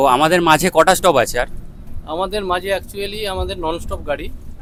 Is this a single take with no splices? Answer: yes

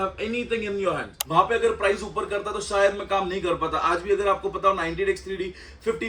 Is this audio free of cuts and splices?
no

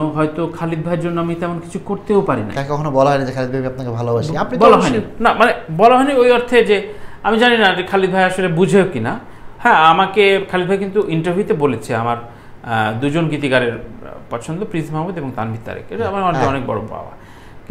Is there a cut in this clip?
no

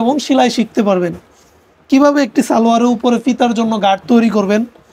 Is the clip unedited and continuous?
yes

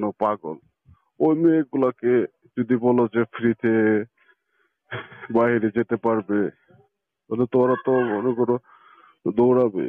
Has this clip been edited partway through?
no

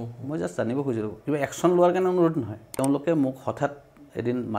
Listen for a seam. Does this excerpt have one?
yes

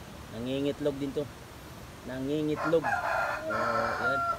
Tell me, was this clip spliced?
no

